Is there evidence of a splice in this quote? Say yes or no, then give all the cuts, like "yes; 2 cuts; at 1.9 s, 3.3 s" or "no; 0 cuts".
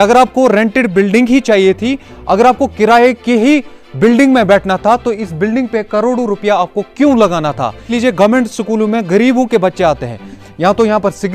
yes; 2 cuts; at 7.9 s, 10.4 s